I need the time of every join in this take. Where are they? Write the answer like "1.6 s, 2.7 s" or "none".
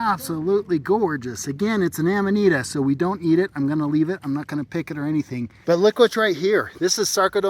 5.5 s